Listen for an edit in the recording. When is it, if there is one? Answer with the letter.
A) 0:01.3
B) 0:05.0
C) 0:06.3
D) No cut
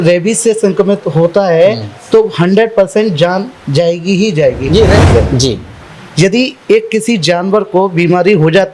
B